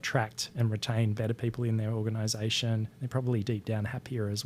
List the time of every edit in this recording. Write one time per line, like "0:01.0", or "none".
0:01.1

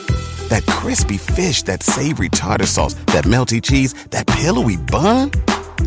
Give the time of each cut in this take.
none

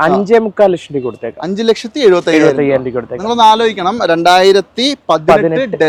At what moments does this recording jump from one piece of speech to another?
none

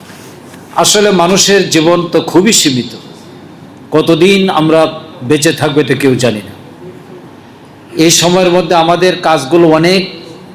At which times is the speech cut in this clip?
none

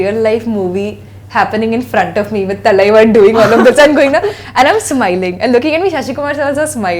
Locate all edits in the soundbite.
none

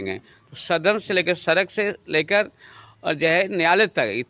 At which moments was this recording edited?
none

